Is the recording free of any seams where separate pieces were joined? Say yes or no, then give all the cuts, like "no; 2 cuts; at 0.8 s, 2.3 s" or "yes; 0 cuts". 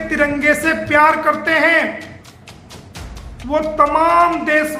yes; 0 cuts